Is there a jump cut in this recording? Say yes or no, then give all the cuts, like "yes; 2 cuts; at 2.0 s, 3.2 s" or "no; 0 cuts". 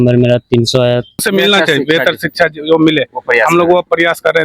yes; 1 cut; at 1.3 s